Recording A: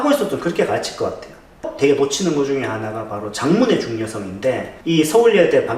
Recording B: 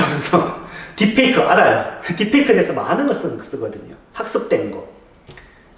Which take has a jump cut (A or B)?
A